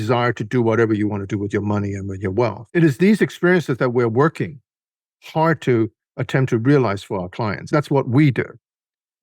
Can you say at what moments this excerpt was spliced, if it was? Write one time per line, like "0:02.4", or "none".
0:02.6
0:07.7